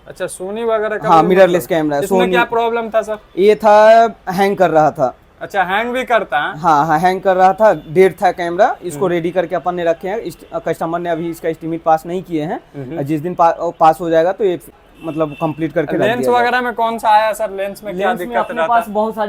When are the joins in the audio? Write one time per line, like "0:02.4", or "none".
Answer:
none